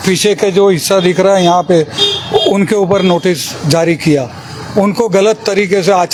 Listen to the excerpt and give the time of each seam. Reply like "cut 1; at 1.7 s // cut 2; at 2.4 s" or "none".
none